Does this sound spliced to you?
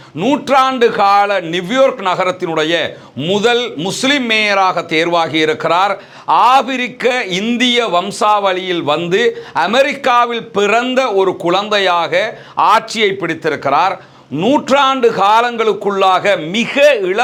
no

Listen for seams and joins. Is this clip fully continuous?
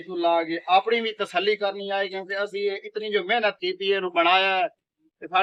yes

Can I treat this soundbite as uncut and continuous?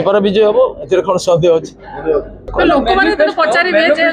no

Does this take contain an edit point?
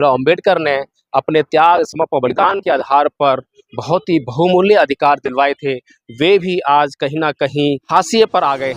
yes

